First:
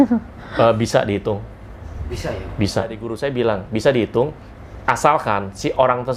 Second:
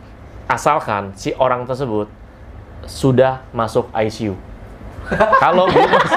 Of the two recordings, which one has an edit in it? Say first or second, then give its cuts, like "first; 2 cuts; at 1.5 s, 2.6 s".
first; 1 cut; at 3.1 s